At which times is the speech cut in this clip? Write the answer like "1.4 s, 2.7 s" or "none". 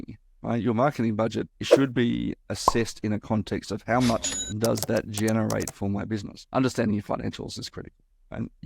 6.4 s

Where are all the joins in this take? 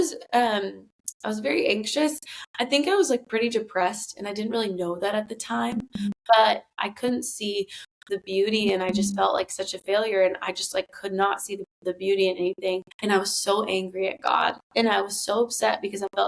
6.8 s, 12.9 s

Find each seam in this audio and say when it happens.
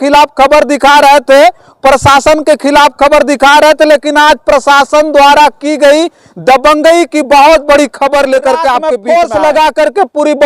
8.9 s

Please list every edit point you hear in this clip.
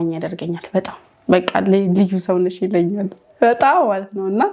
none

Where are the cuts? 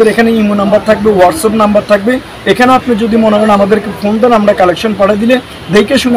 none

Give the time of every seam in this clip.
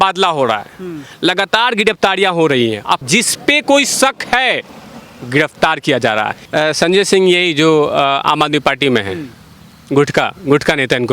3.0 s, 6.4 s

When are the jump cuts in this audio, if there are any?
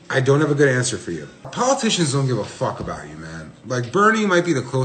1.5 s

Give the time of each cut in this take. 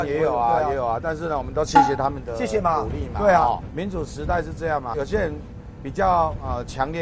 3.7 s, 4.9 s

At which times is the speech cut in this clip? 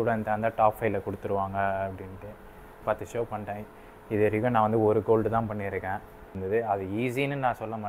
2.8 s, 6.4 s

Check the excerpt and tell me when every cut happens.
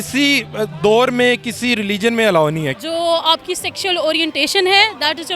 2.8 s

